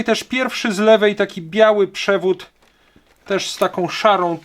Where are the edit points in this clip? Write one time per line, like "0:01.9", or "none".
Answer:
none